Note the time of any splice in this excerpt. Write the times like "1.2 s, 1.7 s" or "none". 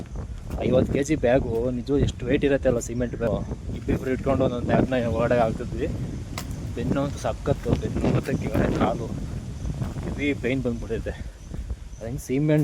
3.3 s

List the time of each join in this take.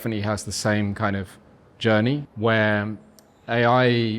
2.3 s

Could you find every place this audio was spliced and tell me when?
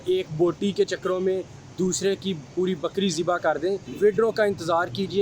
3.9 s

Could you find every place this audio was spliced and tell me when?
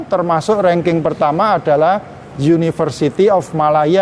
none

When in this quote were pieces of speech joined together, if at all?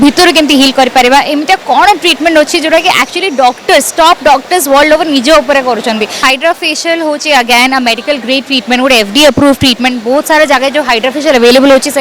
6.1 s

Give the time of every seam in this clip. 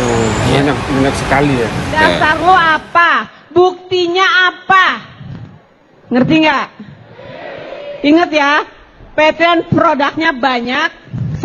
2.2 s

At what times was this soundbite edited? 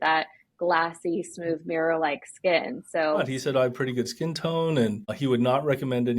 3.2 s

